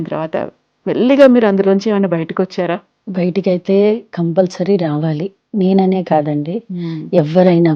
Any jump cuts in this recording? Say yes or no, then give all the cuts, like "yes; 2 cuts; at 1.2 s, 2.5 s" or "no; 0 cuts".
yes; 1 cut; at 3.0 s